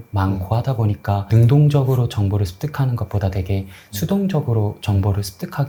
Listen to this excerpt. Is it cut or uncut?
uncut